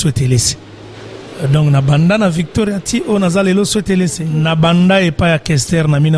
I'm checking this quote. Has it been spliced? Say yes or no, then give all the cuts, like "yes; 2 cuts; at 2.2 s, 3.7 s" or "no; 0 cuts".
yes; 1 cut; at 4.3 s